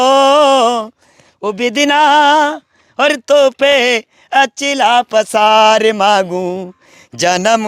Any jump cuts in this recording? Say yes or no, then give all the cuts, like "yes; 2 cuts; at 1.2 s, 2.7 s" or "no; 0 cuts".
no; 0 cuts